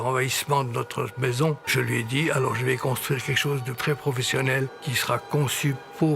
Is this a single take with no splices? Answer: no; 2 cuts; at 1.6 s, 4.8 s

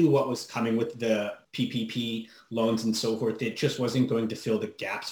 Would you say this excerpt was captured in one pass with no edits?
no; 1 cut; at 1.4 s

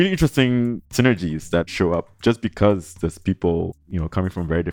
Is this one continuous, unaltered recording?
no; 3 cuts; at 0.8 s, 1.7 s, 3.8 s

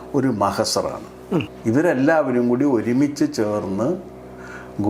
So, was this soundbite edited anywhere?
yes; 1 cut; at 1.5 s

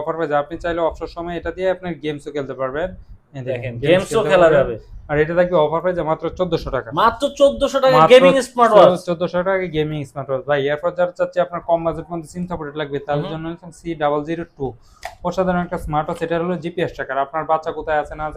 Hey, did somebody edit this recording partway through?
no; 0 cuts

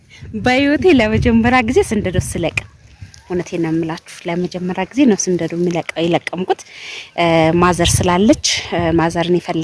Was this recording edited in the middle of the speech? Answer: no; 0 cuts

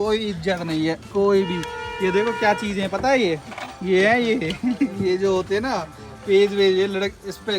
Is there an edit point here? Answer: no; 0 cuts

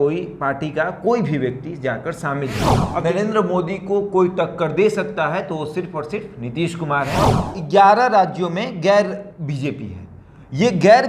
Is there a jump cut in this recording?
yes; 2 cuts; at 2.8 s, 7.4 s

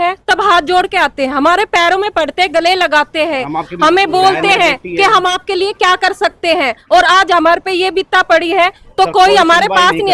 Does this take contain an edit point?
no; 0 cuts

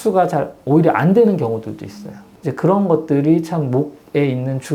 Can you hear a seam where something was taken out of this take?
no; 0 cuts

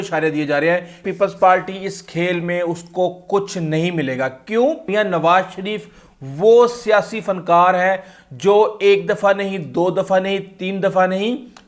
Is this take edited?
yes; 2 cuts; at 1.0 s, 4.9 s

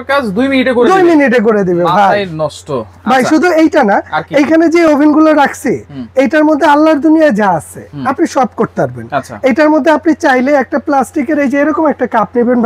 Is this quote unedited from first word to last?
yes; 0 cuts

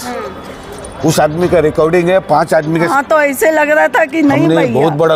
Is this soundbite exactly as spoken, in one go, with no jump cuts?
no; 1 cut; at 2.9 s

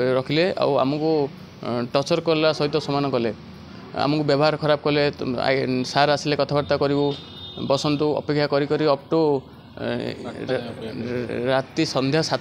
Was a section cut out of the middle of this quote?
no; 0 cuts

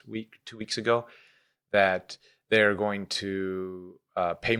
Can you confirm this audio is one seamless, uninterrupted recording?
yes; 0 cuts

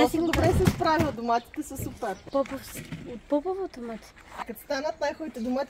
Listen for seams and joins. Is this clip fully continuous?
no; 2 cuts; at 2.2 s, 4.5 s

